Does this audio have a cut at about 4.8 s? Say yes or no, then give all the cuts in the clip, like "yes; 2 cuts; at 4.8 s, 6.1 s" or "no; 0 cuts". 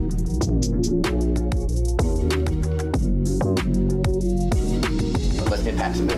no; 0 cuts